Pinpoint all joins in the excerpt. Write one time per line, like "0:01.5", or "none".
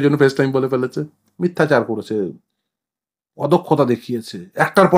0:01.2